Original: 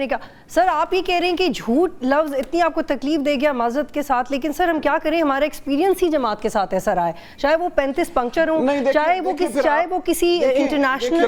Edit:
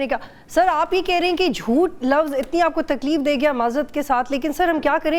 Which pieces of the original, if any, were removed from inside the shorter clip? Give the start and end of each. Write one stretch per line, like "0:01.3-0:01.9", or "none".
none